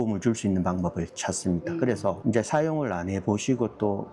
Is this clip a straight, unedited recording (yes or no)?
yes